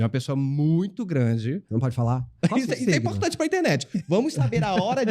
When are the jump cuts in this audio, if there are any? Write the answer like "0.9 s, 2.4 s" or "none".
2.3 s